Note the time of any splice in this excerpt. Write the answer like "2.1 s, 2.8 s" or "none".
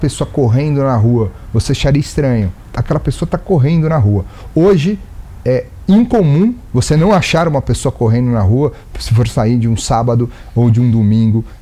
2.6 s